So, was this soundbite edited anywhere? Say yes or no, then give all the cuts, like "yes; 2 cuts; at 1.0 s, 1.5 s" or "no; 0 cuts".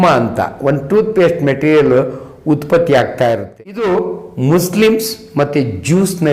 yes; 1 cut; at 3.5 s